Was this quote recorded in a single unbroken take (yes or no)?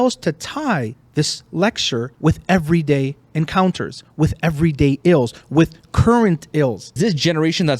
no